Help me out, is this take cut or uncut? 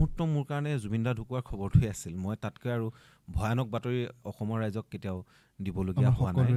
uncut